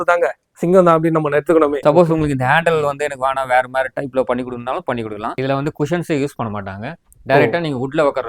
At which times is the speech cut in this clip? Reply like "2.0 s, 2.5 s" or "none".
1.8 s, 5.4 s

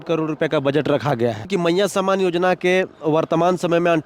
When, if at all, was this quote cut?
1.5 s

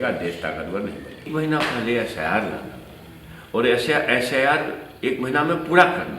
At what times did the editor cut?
1.3 s

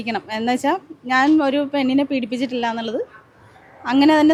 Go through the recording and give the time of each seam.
none

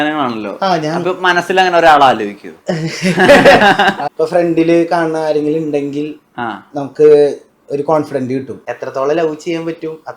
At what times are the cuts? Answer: 4.0 s, 8.6 s

